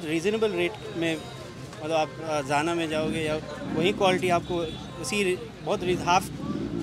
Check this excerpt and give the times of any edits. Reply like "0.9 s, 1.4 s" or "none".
none